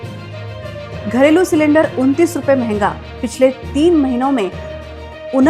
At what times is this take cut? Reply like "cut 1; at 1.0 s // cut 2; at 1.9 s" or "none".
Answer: cut 1; at 1.0 s